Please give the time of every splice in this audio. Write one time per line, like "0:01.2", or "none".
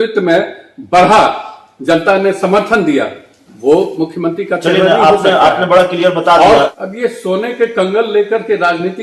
0:06.7